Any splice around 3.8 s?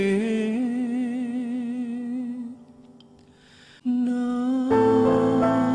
yes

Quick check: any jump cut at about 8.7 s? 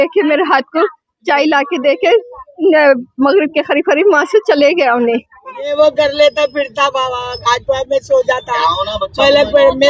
no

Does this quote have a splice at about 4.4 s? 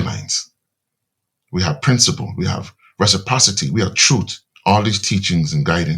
yes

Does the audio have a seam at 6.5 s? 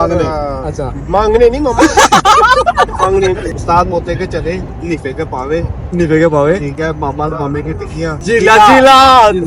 no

